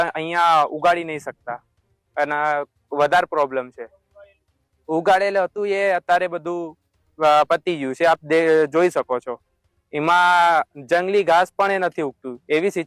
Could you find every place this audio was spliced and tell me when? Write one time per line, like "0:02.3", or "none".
none